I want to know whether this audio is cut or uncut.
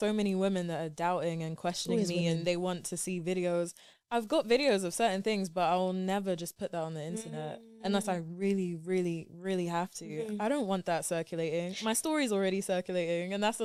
uncut